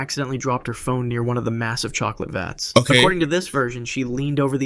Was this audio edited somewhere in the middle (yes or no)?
no